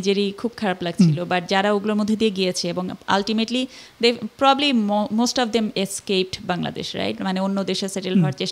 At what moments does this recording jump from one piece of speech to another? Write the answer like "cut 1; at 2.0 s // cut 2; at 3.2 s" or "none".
none

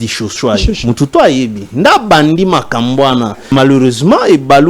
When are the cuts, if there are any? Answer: cut 1; at 3.5 s

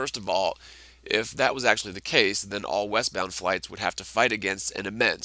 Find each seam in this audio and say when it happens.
cut 1; at 3.2 s

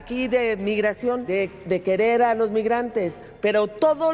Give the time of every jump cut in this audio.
cut 1; at 1.2 s

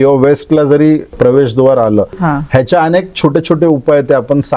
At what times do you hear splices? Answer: cut 1; at 1.1 s // cut 2; at 2.2 s

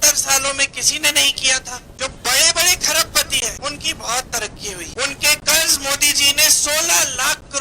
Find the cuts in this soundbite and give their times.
cut 1; at 1.8 s // cut 2; at 3.6 s // cut 3; at 4.9 s

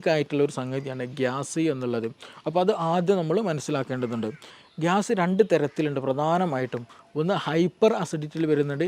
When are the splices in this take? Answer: cut 1; at 4.5 s

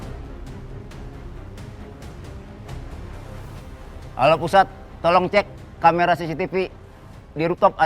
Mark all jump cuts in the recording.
cut 1; at 4.1 s

